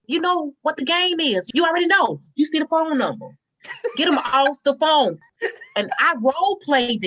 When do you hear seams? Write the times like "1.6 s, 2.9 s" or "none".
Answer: 1.5 s, 5.3 s